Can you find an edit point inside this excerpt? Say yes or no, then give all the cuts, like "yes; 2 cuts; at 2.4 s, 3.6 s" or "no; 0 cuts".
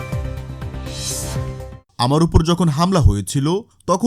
yes; 1 cut; at 1.8 s